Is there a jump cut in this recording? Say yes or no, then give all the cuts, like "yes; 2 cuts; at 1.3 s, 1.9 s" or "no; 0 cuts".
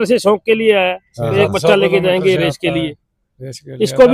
no; 0 cuts